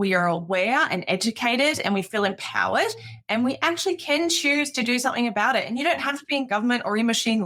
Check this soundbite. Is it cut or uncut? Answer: uncut